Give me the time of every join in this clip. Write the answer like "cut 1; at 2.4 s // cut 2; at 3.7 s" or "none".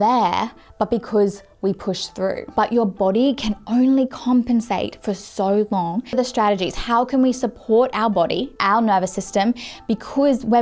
cut 1; at 2.4 s // cut 2; at 6.2 s